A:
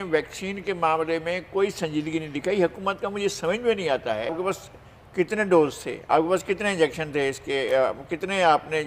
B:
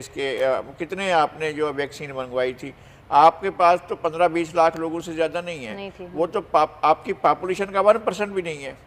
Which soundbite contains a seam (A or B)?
A